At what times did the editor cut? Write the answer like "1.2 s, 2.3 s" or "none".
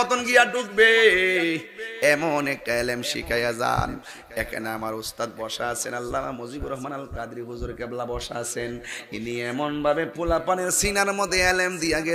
none